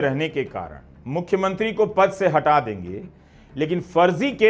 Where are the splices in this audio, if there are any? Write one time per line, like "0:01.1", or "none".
none